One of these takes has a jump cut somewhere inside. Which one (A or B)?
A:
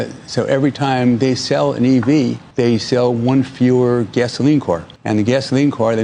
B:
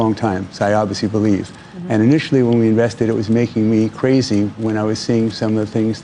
A